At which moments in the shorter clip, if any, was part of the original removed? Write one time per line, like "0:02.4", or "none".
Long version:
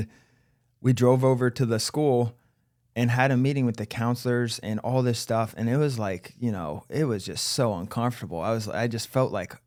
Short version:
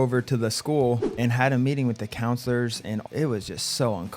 0:01.1
0:03.0

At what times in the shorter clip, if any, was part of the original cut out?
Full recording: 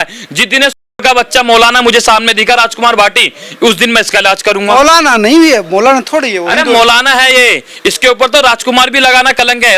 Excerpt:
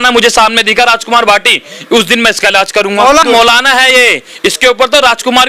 0:03.2

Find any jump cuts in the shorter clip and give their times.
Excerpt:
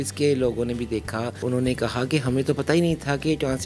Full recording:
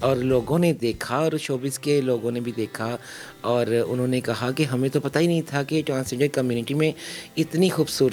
0:01.4

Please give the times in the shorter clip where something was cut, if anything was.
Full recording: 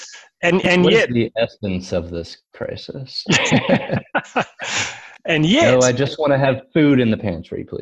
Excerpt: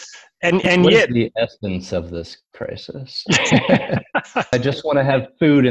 0:04.5

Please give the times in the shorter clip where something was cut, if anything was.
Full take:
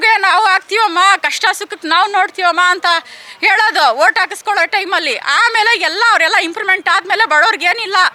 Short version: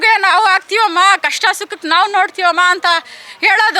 none

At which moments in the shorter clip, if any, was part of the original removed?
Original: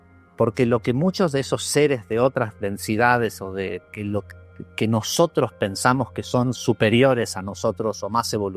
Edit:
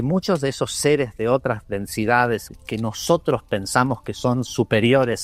0:02.5

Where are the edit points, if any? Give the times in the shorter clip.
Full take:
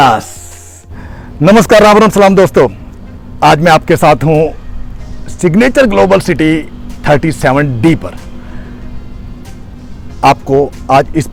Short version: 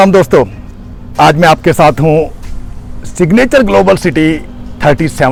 none

